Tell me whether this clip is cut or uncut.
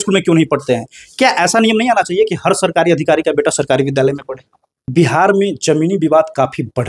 cut